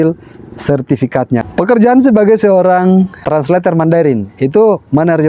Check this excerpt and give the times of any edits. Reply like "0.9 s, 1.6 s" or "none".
1.5 s, 3.1 s